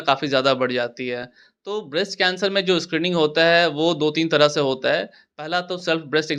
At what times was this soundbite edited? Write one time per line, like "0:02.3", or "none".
none

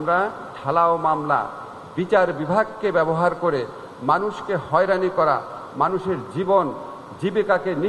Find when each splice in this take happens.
none

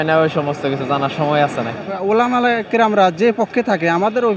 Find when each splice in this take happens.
0:01.9

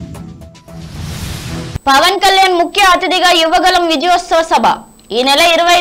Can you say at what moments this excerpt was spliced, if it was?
0:01.8

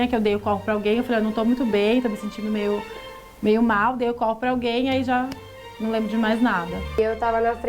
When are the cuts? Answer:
none

